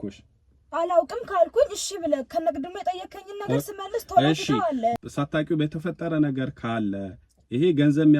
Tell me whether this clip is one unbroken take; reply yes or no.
no